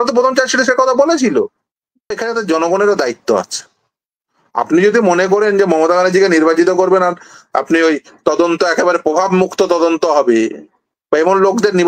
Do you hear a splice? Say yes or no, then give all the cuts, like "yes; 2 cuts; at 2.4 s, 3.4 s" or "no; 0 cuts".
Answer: yes; 1 cut; at 2.2 s